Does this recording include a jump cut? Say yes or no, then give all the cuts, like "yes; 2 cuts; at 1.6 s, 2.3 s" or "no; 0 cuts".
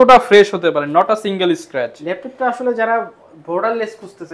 no; 0 cuts